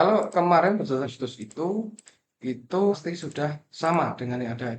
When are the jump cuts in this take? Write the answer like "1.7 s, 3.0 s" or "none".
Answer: 1.0 s, 2.9 s